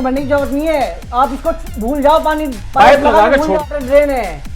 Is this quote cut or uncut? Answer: cut